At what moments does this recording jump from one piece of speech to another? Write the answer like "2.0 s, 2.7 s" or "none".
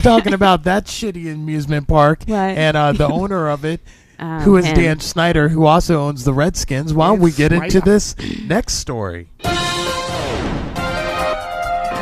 3.8 s